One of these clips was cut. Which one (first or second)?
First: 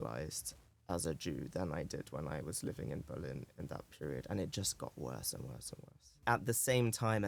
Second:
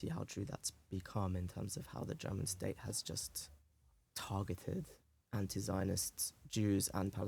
first